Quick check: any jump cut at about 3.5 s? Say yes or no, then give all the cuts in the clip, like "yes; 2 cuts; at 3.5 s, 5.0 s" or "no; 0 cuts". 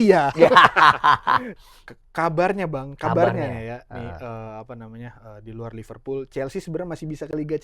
no; 1 cut; at 1.5 s